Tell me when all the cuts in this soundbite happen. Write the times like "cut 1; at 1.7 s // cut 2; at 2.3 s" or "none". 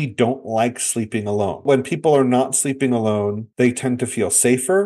cut 1; at 1.6 s